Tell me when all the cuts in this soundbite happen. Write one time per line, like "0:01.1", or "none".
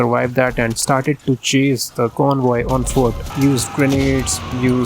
0:03.2